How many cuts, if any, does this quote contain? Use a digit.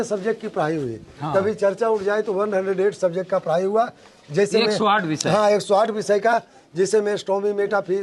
0